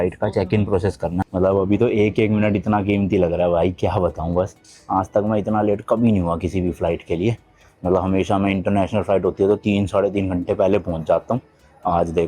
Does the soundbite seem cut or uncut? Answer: cut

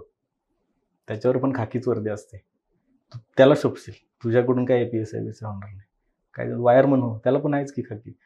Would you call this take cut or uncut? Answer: uncut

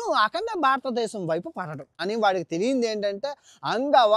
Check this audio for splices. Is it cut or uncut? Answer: cut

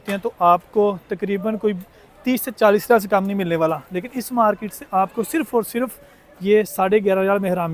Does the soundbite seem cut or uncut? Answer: uncut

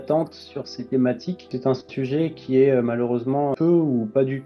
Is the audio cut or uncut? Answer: cut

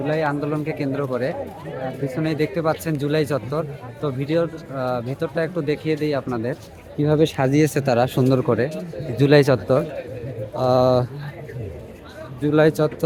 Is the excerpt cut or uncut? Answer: uncut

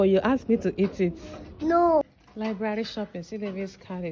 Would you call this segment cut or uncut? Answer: cut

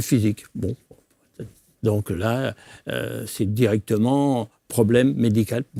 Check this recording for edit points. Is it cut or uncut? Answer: uncut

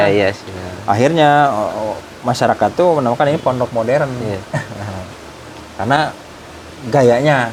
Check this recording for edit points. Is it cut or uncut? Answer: uncut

